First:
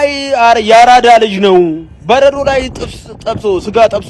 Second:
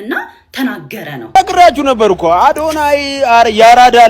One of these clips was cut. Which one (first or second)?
second